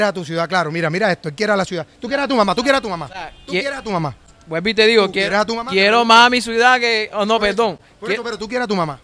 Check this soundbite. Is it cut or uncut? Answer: uncut